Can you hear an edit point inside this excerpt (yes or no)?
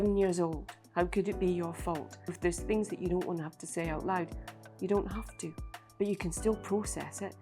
yes